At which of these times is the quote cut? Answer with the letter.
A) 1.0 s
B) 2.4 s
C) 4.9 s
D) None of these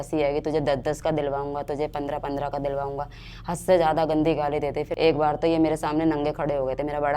C